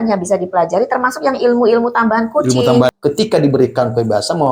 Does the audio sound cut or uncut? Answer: cut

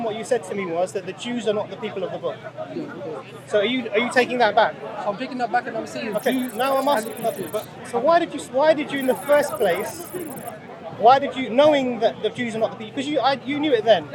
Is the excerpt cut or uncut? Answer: uncut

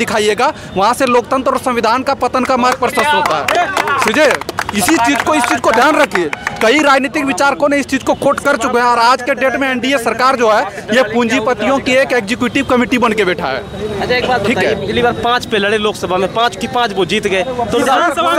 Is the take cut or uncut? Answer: uncut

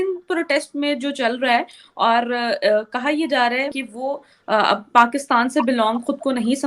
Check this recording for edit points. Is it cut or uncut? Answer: cut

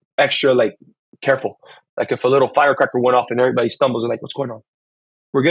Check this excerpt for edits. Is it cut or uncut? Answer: uncut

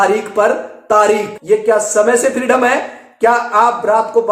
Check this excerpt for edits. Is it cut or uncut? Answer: cut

